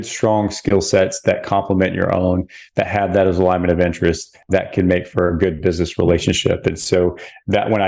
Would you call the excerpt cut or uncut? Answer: uncut